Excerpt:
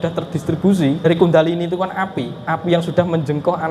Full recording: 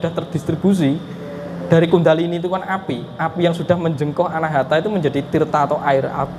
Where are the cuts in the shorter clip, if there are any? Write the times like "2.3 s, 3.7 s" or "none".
1.1 s